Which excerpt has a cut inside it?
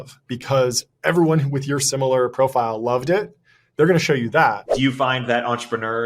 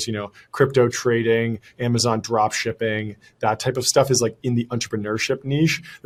first; 1 cut; at 4.7 s

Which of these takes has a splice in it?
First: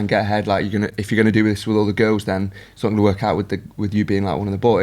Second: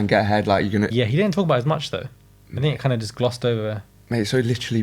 second; 1 cut; at 0.9 s

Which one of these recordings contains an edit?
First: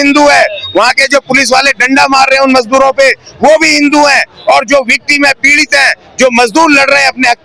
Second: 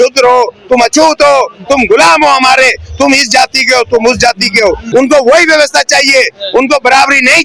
second; 1 cut; at 4.8 s

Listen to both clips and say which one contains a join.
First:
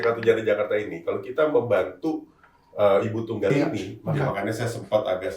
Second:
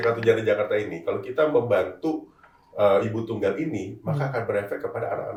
first; 1 cut; at 4.2 s

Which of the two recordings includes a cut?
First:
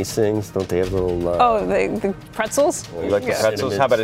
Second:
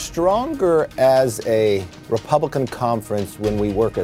first; 1 cut; at 3.0 s

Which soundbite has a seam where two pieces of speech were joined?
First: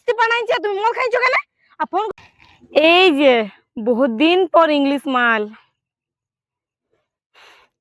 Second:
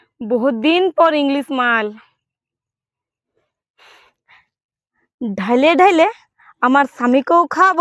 first; 1 cut; at 2.1 s

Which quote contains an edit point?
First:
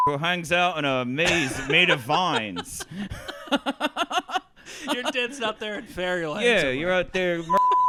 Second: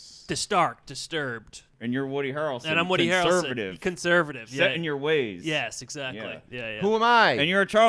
second; 1 cut; at 1.7 s

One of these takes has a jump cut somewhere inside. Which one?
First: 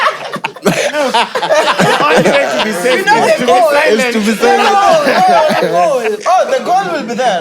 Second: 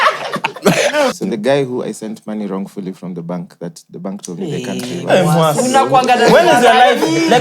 second; 1 cut; at 1.1 s

